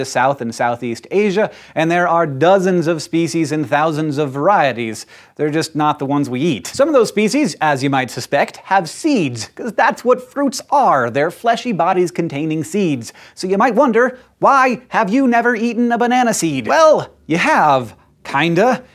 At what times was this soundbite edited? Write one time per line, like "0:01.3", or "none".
none